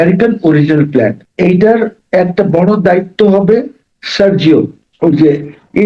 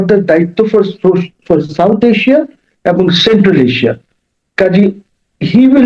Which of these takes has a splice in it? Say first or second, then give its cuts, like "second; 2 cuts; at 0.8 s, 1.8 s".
first; 2 cuts; at 1.2 s, 4.8 s